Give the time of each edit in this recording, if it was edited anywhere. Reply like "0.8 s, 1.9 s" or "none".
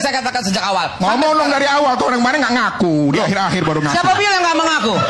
none